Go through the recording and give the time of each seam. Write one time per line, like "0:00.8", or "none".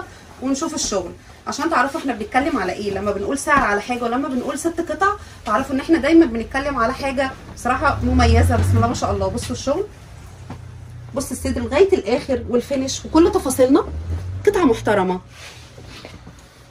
none